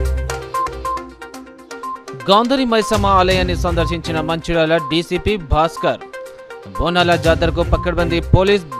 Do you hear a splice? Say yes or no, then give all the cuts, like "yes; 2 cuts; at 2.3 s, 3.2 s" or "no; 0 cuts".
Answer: yes; 1 cut; at 1.5 s